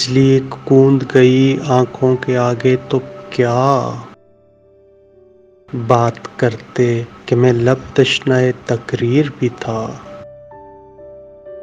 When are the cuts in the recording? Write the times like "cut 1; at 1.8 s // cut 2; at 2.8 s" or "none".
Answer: none